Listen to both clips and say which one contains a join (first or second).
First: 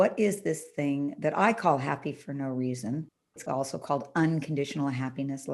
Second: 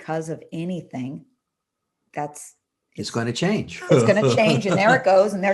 first